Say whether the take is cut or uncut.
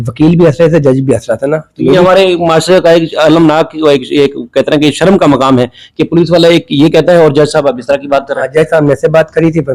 uncut